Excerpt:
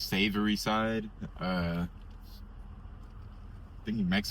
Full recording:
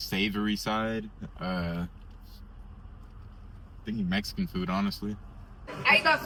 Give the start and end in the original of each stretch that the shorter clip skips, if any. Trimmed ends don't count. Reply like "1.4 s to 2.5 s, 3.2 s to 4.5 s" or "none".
none